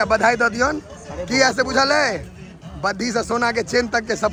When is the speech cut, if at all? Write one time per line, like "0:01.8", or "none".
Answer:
none